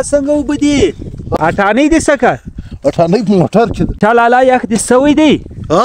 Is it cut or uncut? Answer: cut